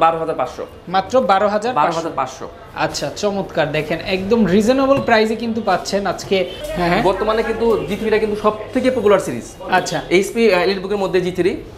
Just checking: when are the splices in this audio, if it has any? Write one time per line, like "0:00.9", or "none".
none

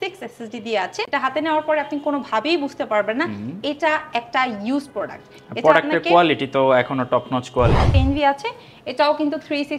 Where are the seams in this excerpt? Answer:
0:01.0
0:07.9

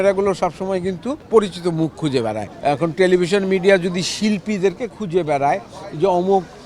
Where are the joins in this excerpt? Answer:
0:01.1
0:02.5

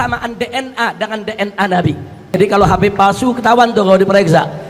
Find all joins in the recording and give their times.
0:02.1

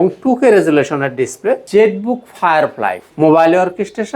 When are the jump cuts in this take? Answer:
0:01.6
0:03.0

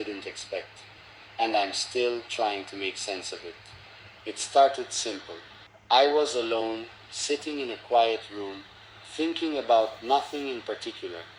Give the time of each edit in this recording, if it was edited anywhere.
none

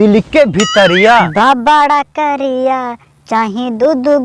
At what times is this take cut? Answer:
0:01.3

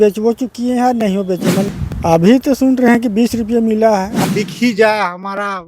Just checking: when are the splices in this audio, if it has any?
0:01.7
0:04.2

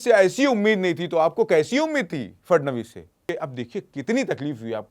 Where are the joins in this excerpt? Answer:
0:03.2

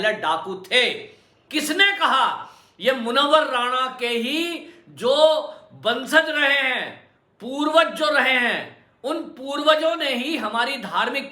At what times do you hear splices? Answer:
0:01.4

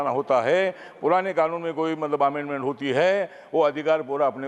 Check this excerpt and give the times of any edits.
none

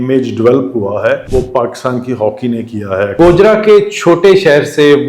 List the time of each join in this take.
0:01.2
0:03.1

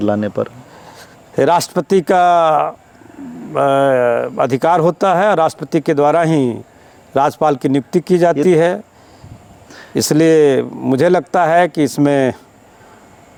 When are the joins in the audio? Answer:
none

